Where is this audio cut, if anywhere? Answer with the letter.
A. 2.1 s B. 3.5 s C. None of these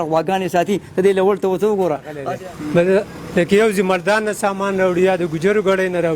A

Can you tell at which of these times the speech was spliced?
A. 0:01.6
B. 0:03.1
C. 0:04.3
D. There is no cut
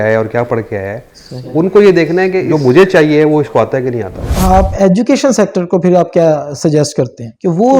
C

